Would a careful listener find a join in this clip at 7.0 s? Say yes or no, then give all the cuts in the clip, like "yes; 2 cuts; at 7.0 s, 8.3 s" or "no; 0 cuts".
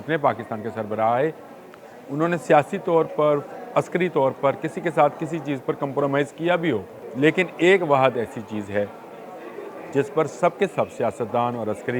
yes; 1 cut; at 7.0 s